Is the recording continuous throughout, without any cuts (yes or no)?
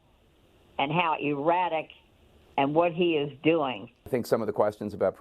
no